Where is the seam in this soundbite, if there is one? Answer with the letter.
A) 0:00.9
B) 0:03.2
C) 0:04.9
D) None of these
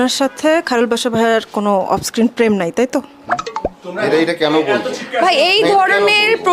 D